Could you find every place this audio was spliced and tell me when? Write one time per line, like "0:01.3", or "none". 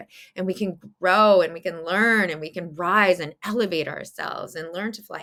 none